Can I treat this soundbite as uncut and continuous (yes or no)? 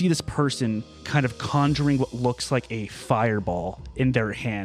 no